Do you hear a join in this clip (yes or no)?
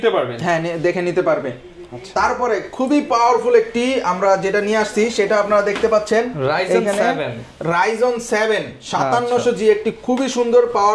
no